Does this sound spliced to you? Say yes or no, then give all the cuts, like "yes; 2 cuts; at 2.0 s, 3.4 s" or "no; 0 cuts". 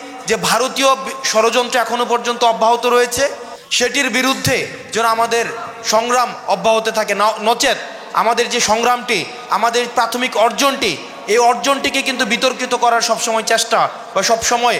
no; 0 cuts